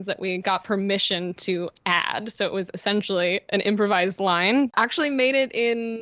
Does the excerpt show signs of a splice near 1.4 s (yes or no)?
no